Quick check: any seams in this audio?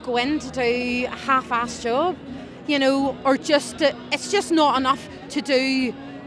no; 0 cuts

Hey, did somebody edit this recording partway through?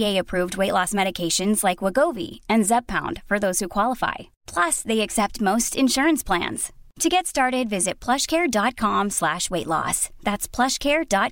no; 0 cuts

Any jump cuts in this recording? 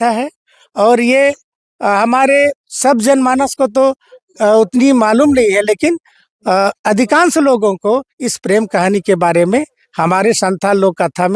no; 0 cuts

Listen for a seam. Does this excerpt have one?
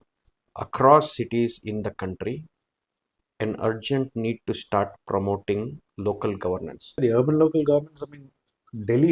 yes; 1 cut; at 7.0 s

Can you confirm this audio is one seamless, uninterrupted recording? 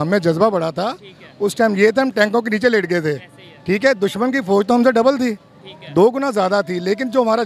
yes; 0 cuts

